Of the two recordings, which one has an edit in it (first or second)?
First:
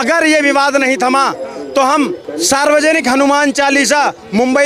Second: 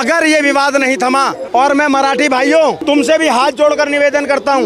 second